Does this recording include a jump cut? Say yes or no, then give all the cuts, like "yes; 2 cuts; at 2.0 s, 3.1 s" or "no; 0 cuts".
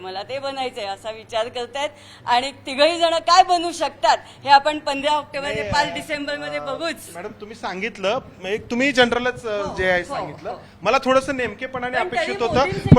no; 0 cuts